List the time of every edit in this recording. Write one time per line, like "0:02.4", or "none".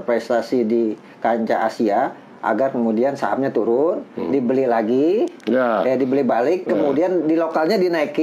none